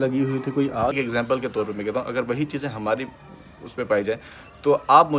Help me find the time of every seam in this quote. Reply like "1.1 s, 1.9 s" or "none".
1.0 s

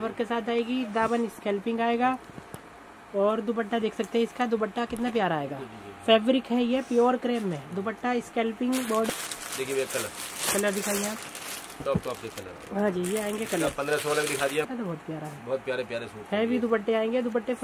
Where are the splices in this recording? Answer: 9.1 s, 14.7 s

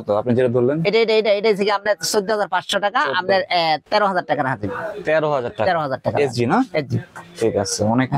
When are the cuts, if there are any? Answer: none

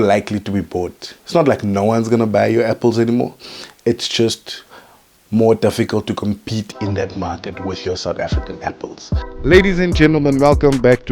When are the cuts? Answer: 9.3 s

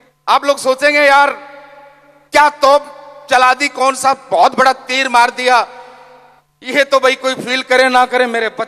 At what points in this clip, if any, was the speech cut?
none

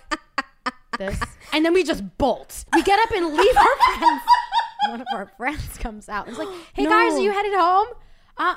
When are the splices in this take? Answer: 1.5 s, 2.5 s, 5.0 s

